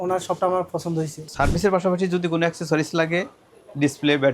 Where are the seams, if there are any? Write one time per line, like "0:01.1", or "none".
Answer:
0:01.2